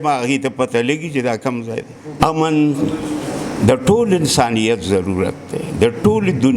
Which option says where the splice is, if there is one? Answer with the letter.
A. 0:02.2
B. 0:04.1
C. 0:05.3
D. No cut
A